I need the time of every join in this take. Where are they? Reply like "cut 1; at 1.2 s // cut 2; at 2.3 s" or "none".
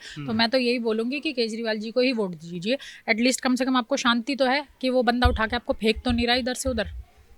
none